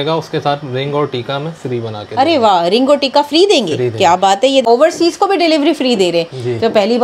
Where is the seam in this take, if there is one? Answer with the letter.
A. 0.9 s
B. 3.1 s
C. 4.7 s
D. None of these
C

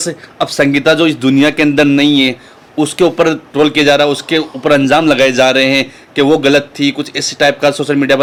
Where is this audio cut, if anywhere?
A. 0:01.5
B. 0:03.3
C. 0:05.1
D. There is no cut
D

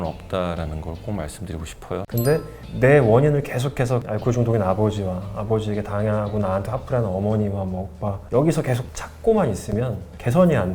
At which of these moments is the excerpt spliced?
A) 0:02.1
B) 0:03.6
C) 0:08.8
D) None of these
A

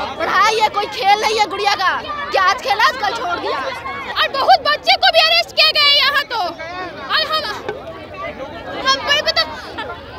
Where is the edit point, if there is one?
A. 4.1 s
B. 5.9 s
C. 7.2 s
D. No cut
A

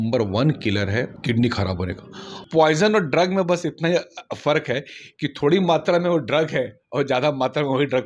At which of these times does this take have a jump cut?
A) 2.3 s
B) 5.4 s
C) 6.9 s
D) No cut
A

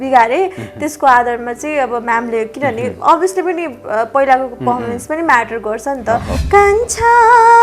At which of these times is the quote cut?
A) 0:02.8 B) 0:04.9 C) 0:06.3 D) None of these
C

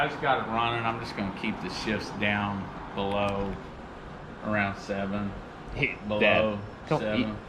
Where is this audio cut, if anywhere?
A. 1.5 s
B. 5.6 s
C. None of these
C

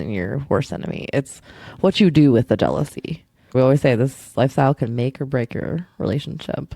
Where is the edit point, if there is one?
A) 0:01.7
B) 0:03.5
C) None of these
B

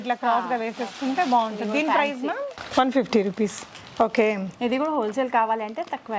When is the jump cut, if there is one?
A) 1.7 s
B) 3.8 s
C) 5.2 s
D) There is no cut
D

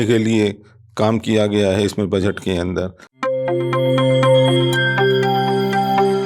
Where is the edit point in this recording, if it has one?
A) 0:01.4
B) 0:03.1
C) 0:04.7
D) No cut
B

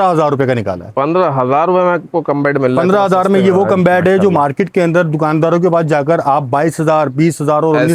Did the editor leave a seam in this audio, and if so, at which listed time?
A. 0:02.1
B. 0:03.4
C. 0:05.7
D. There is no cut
D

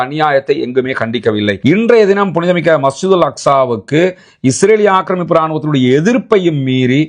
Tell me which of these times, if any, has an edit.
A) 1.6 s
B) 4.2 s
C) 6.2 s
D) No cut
A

